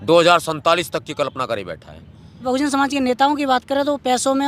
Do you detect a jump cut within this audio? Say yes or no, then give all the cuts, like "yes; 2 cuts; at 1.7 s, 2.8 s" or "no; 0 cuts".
yes; 1 cut; at 2.4 s